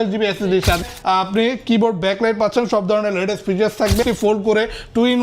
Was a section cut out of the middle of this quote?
yes; 2 cuts; at 0.8 s, 4.0 s

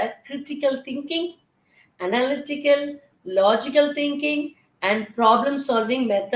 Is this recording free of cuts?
yes; 0 cuts

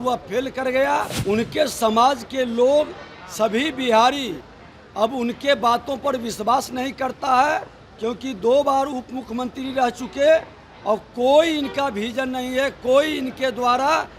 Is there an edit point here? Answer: yes; 1 cut; at 1.1 s

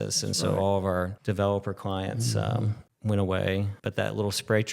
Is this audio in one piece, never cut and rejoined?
no; 3 cuts; at 1.2 s, 2.9 s, 3.7 s

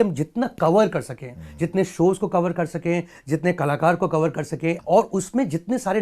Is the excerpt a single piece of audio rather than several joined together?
no; 1 cut; at 4.8 s

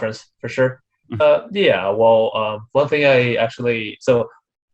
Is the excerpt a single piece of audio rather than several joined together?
yes; 0 cuts

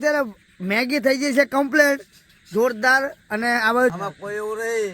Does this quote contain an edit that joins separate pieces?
yes; 1 cut; at 3.6 s

